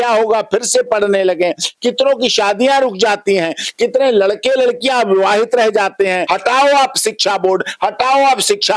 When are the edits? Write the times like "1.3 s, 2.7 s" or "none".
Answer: 6.2 s